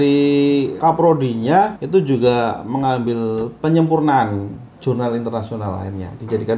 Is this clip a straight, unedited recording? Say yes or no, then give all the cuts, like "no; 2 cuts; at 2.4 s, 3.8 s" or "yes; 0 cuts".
no; 2 cuts; at 0.8 s, 1.8 s